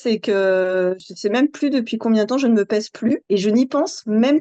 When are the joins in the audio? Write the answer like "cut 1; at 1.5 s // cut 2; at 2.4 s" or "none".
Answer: cut 1; at 1.1 s